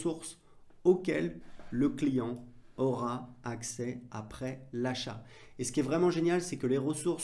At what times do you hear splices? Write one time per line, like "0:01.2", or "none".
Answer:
none